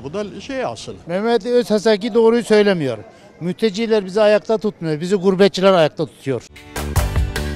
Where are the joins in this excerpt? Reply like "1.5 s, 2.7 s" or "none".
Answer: 0.9 s, 6.6 s